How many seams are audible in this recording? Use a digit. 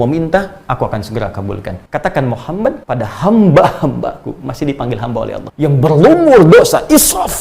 3